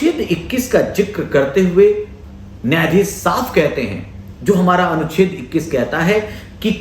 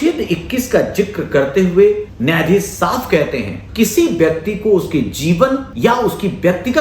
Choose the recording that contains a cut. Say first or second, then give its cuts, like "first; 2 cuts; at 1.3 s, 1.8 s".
second; 3 cuts; at 2.1 s, 3.6 s, 5.7 s